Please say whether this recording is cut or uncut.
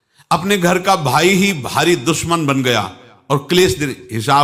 uncut